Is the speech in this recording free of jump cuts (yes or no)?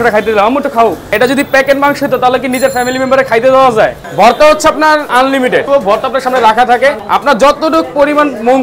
no